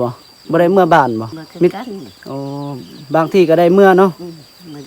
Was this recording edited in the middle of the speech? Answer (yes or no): yes